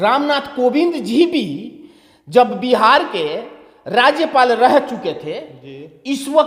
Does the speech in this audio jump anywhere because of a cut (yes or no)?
no